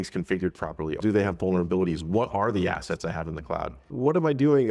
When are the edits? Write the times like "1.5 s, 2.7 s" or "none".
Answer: 1.0 s, 3.8 s